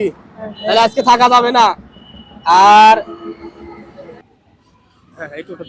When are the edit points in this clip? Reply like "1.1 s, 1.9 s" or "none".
4.2 s